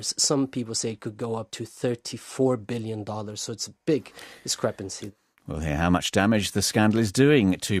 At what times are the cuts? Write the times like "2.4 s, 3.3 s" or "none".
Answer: 1.6 s, 4.9 s